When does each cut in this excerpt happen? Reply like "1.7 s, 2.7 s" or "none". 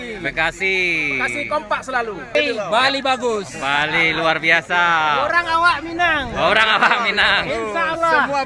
2.3 s